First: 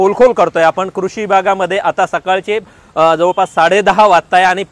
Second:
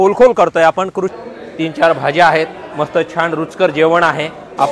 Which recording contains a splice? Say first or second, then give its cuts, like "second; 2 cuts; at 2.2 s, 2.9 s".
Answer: second; 1 cut; at 1.2 s